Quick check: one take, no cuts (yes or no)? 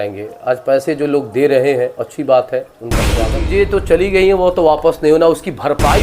no